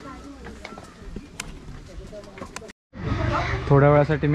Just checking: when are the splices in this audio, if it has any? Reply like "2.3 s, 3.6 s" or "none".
2.8 s